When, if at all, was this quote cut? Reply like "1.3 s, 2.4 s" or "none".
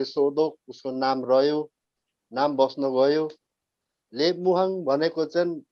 none